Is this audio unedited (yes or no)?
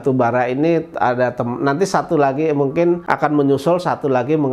no